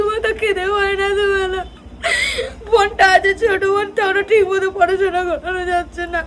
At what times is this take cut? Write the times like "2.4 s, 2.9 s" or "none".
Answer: none